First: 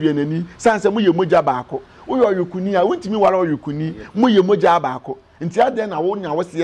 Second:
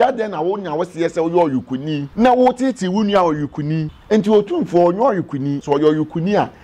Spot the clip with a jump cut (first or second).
second